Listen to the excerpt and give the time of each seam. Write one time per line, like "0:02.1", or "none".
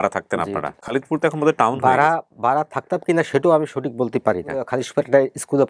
0:00.9
0:04.7